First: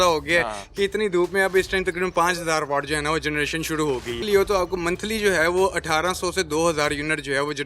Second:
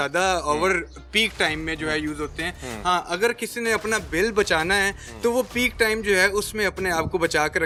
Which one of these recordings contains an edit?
first; 1 cut; at 4.2 s

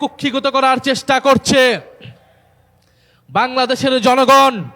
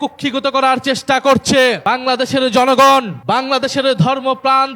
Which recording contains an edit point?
second; 2 cuts; at 1.8 s, 3.1 s

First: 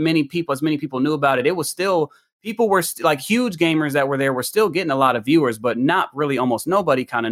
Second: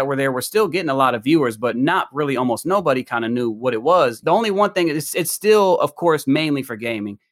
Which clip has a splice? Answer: second; 1 cut; at 4.2 s

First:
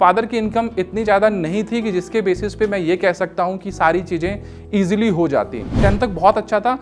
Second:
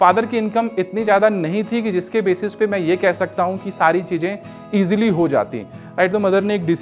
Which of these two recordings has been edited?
first; 1 cut; at 5.8 s

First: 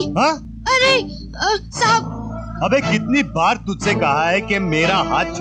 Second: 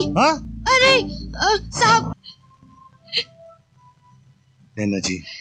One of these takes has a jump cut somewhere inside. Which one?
second; 1 cut; at 2.2 s

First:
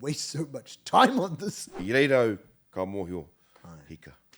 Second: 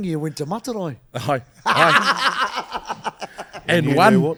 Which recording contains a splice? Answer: first; 1 cut; at 1.8 s

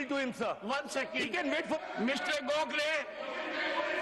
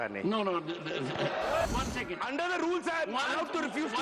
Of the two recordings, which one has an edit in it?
second; 1 cut; at 1.7 s

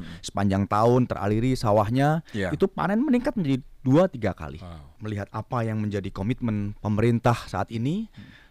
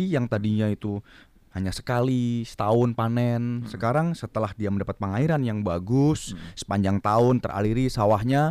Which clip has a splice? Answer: first; 1 cut; at 4.9 s

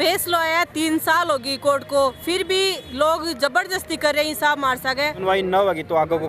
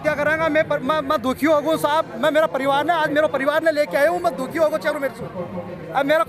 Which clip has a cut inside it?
first; 1 cut; at 5.2 s

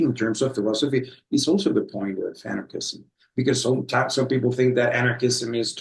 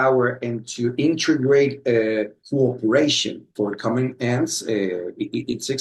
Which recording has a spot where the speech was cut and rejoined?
second; 2 cuts; at 2.4 s, 3.5 s

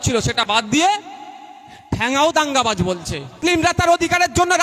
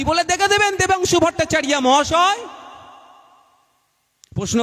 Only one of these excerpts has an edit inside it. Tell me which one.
first; 1 cut; at 3.3 s

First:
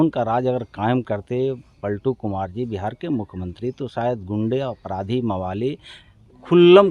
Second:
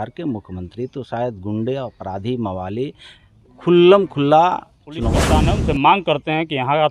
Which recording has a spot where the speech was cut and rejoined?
second; 1 cut; at 5.3 s

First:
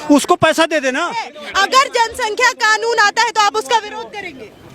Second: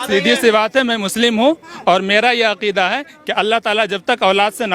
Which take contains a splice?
first; 1 cut; at 1.4 s

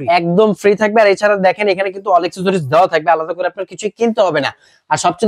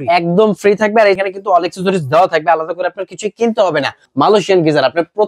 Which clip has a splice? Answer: second; 2 cuts; at 1.2 s, 4.0 s

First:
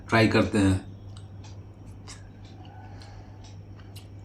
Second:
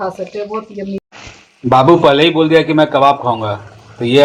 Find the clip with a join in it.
second; 1 cut; at 1.0 s

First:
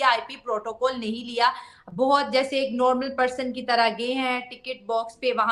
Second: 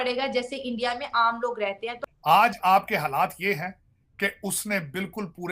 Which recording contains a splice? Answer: second; 1 cut; at 2.0 s

